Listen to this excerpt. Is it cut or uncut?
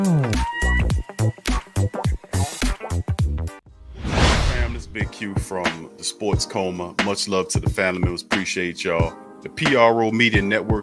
cut